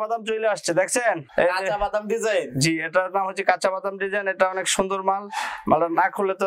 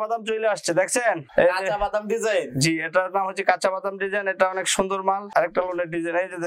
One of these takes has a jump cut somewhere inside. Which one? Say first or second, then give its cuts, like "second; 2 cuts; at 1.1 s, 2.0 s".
second; 1 cut; at 5.2 s